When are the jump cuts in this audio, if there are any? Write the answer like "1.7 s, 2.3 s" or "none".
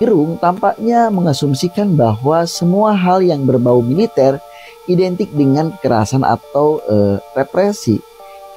none